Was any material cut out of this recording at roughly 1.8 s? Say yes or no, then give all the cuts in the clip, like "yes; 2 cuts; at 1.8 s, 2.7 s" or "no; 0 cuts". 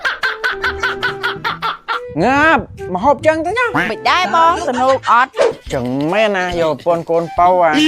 no; 1 cut; at 5.6 s